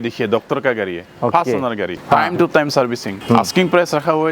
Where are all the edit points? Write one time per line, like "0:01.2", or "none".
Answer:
0:01.0
0:02.0
0:03.1